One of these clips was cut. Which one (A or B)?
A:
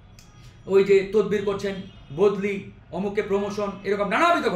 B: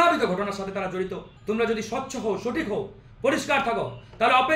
B